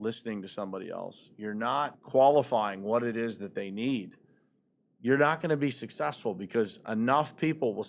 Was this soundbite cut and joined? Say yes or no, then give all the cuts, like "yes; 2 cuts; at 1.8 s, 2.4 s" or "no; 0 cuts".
yes; 1 cut; at 2.0 s